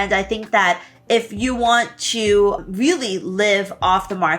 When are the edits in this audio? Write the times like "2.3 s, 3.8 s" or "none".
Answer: 2.6 s

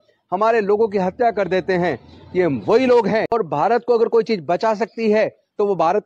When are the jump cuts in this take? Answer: 3.3 s

